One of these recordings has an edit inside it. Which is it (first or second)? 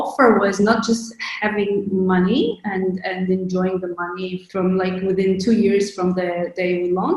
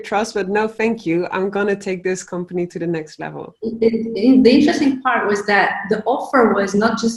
first